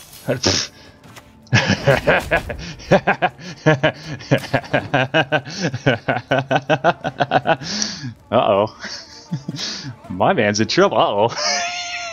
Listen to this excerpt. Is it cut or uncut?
uncut